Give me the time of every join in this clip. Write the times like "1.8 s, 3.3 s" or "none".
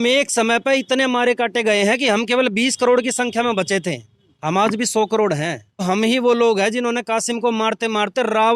5.8 s